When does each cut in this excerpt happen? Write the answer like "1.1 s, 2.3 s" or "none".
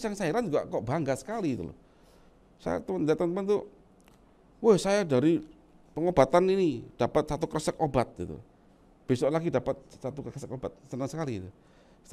none